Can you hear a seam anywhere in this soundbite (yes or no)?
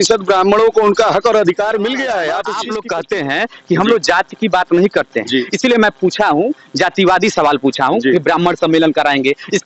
yes